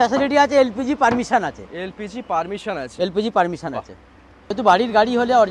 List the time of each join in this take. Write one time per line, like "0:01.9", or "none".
0:04.4